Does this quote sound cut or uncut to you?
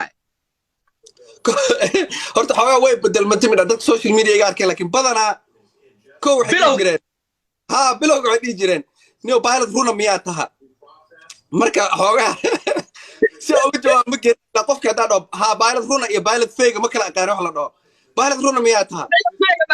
uncut